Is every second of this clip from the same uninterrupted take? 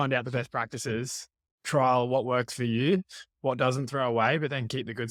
yes; 0 cuts

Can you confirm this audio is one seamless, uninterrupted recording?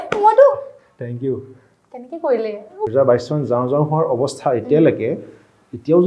no; 1 cut; at 2.9 s

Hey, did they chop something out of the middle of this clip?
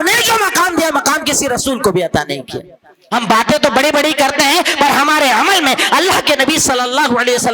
yes; 1 cut; at 3.0 s

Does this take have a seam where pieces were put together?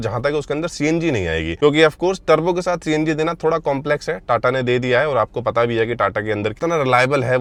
no; 0 cuts

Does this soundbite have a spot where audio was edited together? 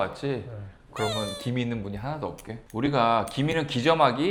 no; 0 cuts

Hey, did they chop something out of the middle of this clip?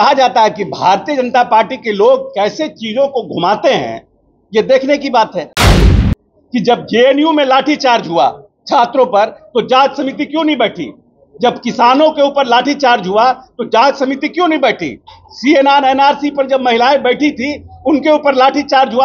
yes; 1 cut; at 6.0 s

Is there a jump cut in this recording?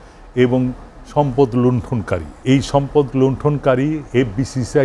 yes; 1 cut; at 2.3 s

